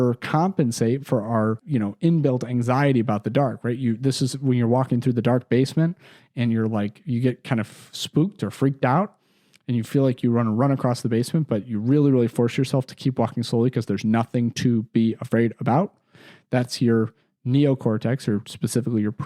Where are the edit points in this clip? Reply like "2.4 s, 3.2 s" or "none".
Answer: none